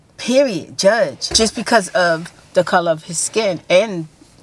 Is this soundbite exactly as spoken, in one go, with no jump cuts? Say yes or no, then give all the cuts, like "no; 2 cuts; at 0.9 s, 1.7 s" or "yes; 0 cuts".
no; 1 cut; at 1.2 s